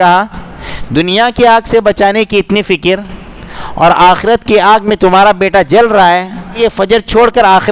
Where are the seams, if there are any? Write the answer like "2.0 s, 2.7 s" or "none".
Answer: 6.6 s